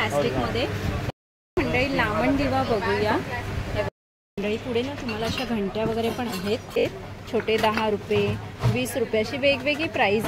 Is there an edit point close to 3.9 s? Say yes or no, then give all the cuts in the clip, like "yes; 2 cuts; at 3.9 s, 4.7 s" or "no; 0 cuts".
yes; 3 cuts; at 1.1 s, 3.9 s, 6.8 s